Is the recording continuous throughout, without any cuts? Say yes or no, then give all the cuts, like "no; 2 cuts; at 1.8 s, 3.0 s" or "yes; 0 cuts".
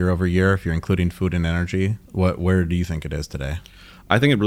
no; 1 cut; at 2.0 s